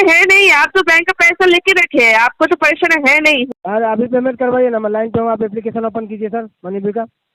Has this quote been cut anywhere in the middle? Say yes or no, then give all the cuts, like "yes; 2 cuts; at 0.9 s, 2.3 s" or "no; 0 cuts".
yes; 1 cut; at 3.5 s